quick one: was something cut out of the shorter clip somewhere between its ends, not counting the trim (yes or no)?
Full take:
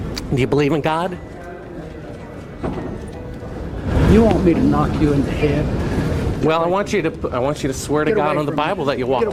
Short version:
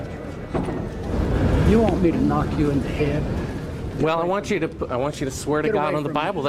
yes